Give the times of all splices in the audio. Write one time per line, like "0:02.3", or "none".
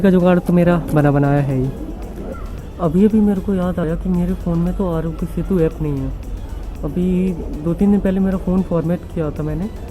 none